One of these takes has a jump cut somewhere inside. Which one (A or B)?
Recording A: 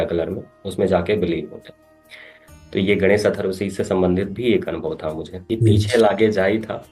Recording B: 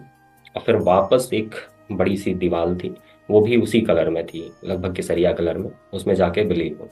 A